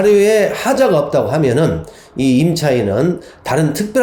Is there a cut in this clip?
no; 0 cuts

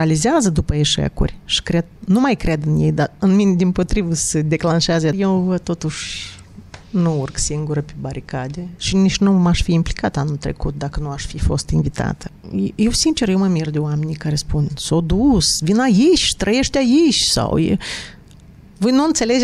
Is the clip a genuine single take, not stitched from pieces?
no; 2 cuts; at 5.1 s, 12.3 s

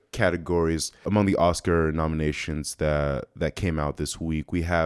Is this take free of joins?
no; 1 cut; at 0.9 s

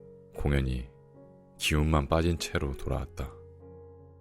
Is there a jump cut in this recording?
yes; 1 cut; at 3.3 s

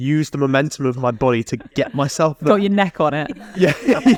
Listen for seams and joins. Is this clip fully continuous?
yes; 0 cuts

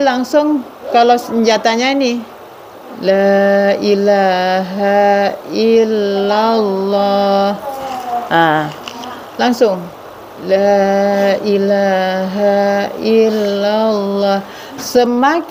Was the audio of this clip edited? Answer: no; 0 cuts

